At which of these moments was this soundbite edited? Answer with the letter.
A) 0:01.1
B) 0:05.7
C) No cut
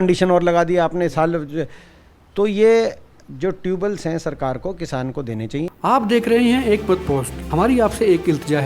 B